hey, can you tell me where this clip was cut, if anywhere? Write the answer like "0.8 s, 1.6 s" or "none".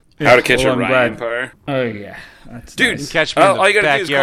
1.5 s